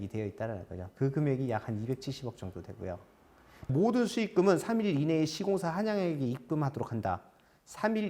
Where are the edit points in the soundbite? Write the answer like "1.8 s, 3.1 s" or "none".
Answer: 3.7 s